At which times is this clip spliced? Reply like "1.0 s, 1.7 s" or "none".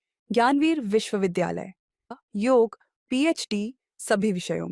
2.1 s